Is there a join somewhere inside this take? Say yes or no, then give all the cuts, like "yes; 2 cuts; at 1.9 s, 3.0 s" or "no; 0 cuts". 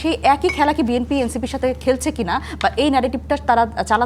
no; 0 cuts